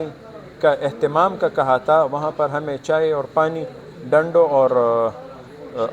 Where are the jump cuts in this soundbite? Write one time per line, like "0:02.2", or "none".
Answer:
none